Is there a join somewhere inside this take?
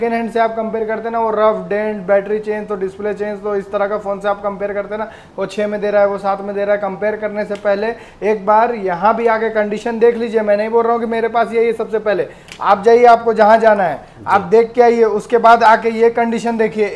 no; 0 cuts

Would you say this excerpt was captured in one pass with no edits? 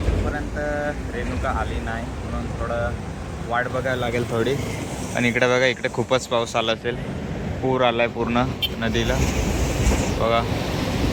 yes; 0 cuts

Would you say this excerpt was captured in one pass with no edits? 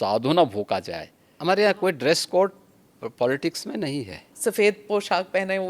no; 2 cuts; at 1.4 s, 4.3 s

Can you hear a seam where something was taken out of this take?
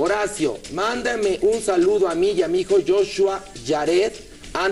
yes; 1 cut; at 2.4 s

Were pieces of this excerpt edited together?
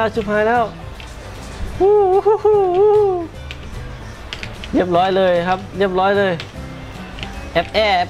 no; 0 cuts

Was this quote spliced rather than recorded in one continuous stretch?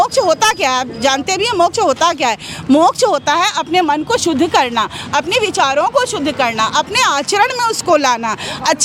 no; 0 cuts

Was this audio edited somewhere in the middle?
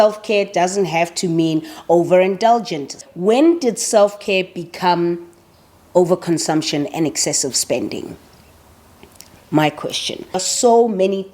yes; 2 cuts; at 3.0 s, 10.5 s

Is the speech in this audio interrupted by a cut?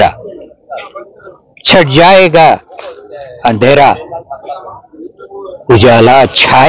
no; 0 cuts

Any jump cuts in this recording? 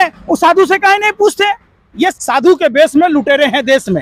yes; 1 cut; at 2.2 s

